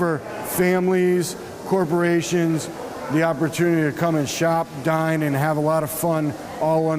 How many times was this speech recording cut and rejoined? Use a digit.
1